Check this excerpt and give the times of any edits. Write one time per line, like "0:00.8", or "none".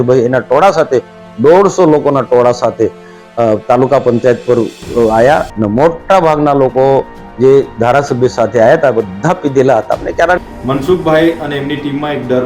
0:05.5
0:10.4